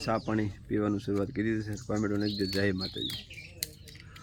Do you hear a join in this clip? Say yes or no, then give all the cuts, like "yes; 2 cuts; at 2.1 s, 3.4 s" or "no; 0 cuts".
no; 0 cuts